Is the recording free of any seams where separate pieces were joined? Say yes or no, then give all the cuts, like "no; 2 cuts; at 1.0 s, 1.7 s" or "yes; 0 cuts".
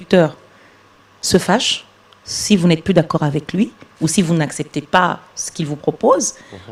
yes; 0 cuts